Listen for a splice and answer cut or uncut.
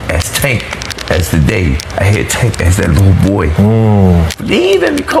uncut